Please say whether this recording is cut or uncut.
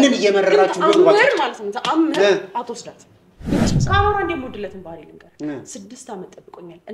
cut